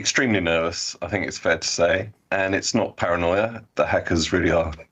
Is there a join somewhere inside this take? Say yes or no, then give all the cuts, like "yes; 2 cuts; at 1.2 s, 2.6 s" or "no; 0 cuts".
yes; 1 cut; at 2.2 s